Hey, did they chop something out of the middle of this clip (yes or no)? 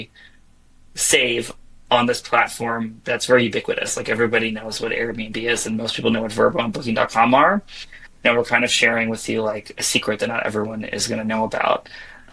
no